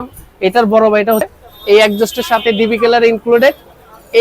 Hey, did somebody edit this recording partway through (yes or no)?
yes